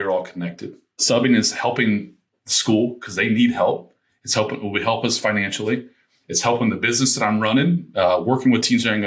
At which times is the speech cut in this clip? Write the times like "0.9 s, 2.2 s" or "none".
1.0 s